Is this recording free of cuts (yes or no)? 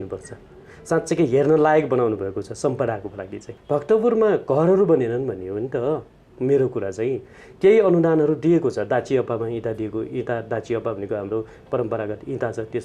no